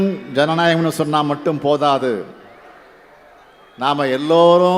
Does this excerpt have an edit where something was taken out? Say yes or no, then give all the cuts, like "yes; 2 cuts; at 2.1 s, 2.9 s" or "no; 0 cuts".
no; 0 cuts